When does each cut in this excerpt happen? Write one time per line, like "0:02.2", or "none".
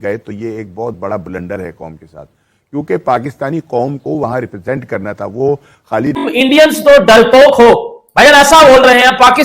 0:06.2